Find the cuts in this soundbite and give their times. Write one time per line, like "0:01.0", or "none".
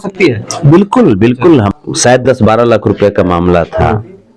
0:01.7